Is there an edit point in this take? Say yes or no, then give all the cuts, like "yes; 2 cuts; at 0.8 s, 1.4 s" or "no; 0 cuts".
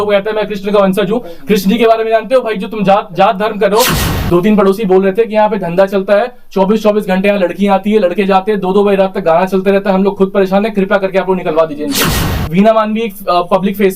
yes; 2 cuts; at 4.0 s, 12.2 s